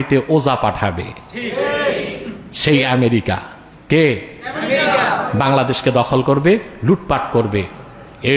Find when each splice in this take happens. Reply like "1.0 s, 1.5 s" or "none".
none

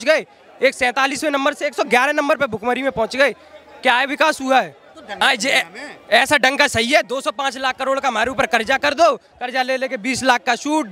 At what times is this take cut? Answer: 5.2 s

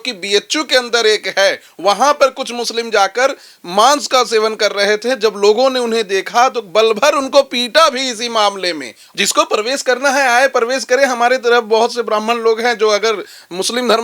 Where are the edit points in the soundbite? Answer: 9.0 s

